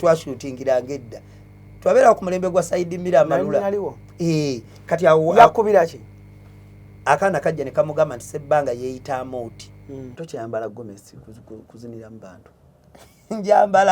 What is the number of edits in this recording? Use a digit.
1